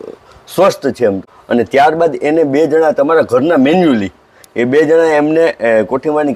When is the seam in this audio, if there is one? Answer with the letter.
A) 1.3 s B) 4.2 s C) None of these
A